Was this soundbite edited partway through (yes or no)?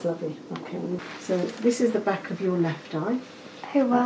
yes